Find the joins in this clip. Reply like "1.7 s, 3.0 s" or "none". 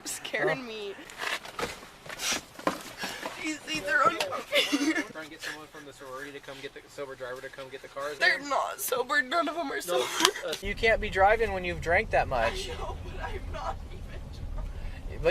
1.0 s, 5.1 s, 8.2 s, 10.6 s